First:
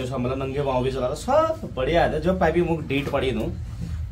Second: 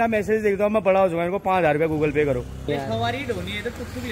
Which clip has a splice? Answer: second; 1 cut; at 2.7 s

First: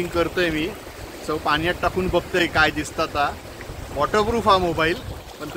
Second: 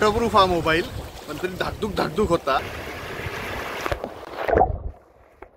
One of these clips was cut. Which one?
second; 1 cut; at 2.6 s

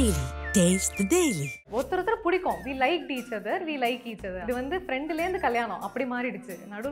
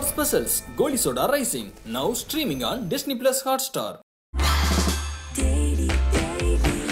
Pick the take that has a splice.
first; 2 cuts; at 1.5 s, 4.4 s

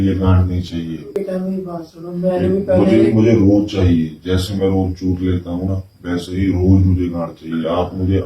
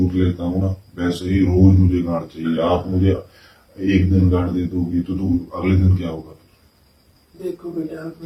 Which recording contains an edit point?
first; 1 cut; at 1.1 s

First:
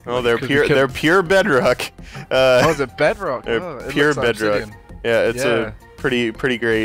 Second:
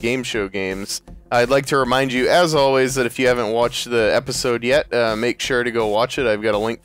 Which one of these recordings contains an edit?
first; 1 cut; at 3.2 s

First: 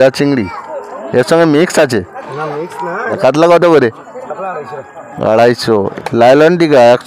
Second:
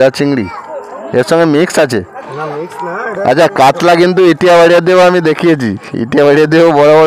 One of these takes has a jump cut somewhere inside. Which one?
first; 2 cuts; at 3.1 s, 5.9 s

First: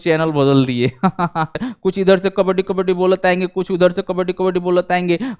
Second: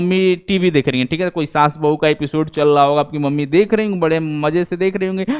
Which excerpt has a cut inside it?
first; 1 cut; at 1.6 s

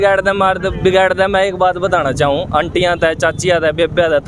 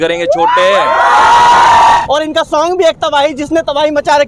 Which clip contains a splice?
second; 1 cut; at 2.0 s

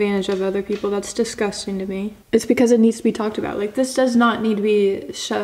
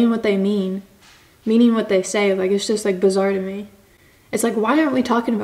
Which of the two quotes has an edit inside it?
first; 1 cut; at 2.1 s

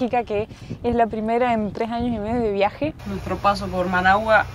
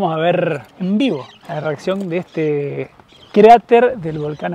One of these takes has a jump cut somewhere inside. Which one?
first; 1 cut; at 3.1 s

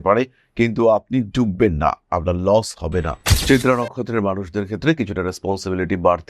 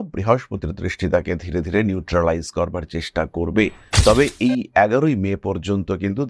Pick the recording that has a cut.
first; 1 cut; at 3.3 s

